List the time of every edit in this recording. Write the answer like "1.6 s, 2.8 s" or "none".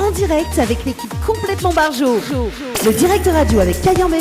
2.6 s